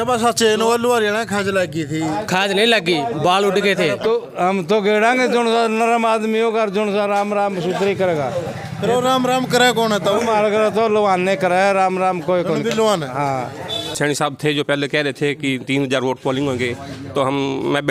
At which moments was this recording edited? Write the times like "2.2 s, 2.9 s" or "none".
4.0 s, 13.9 s